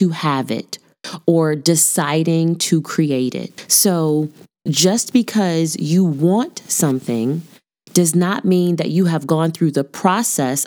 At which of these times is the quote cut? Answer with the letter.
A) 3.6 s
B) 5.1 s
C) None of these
A